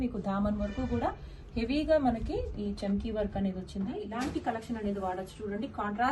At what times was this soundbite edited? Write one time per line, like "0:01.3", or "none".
0:04.0